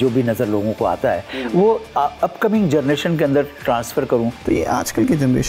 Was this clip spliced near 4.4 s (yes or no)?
yes